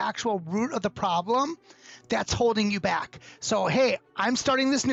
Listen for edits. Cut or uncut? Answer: uncut